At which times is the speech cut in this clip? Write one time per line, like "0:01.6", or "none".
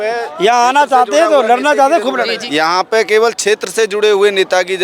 0:02.4